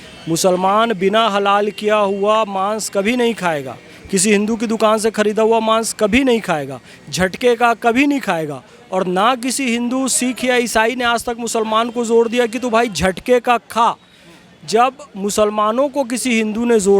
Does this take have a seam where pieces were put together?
no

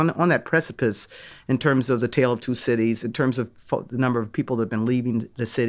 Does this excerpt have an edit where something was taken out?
no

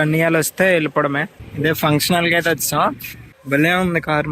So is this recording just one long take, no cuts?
no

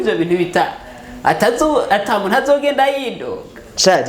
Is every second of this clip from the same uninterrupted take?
yes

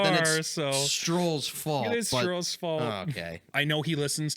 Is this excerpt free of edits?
no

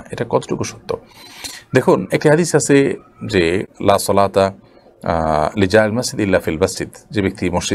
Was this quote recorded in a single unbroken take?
yes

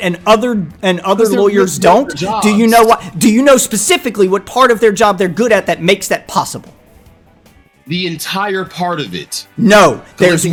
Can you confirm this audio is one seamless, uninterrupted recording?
yes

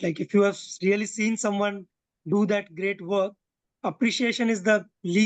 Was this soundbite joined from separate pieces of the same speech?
no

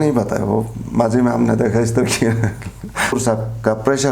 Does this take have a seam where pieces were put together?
yes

